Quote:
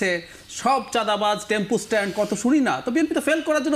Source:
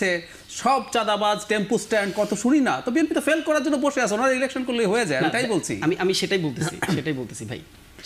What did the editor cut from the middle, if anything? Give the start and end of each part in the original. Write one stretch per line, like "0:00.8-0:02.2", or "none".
none